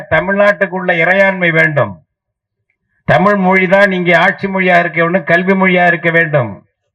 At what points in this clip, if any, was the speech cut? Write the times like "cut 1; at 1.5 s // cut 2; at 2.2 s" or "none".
none